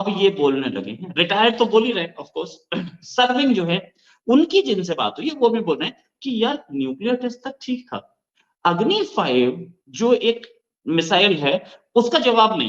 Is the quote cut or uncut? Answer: uncut